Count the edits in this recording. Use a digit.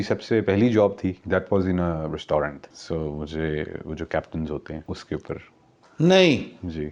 3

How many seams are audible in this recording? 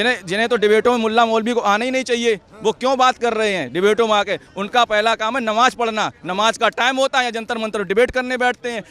0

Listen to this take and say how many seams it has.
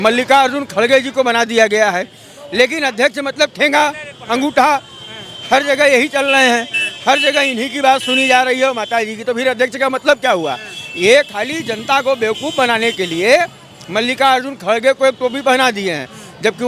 0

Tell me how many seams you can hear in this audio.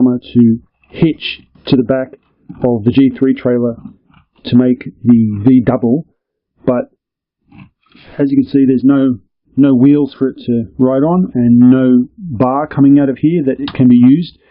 1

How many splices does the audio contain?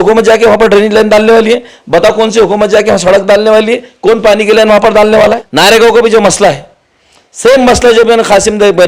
1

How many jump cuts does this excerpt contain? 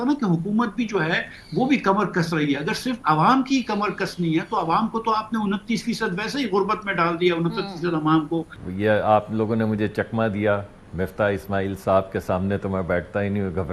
1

